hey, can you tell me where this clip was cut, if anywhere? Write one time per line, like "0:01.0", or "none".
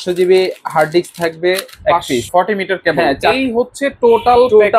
0:02.2

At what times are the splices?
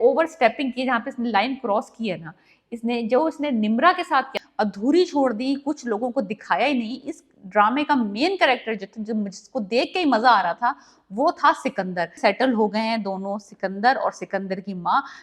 0:04.4
0:12.2

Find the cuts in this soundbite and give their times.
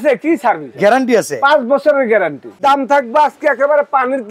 0:02.6

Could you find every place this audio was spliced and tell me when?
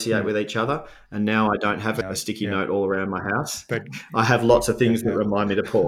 0:02.0

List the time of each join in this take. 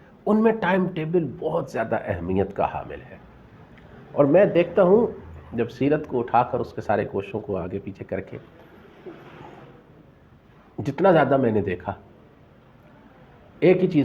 none

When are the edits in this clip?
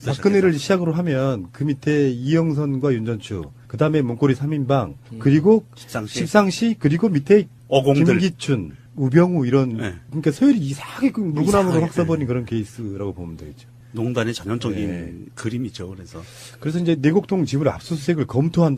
0:11.7

